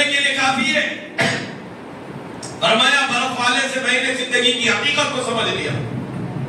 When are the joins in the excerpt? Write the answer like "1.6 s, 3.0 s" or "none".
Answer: none